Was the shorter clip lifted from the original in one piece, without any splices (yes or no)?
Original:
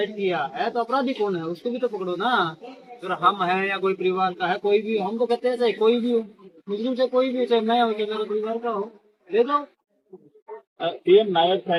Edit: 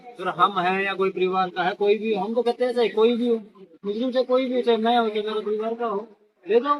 yes